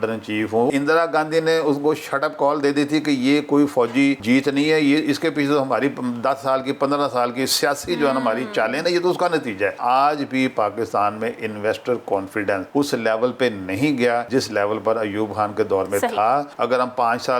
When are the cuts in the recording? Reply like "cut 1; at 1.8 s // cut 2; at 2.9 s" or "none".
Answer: cut 1; at 0.7 s // cut 2; at 4.2 s // cut 3; at 9.8 s // cut 4; at 12.6 s // cut 5; at 14.3 s // cut 6; at 16.5 s